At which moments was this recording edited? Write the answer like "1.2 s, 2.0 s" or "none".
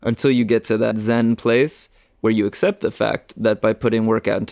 1.0 s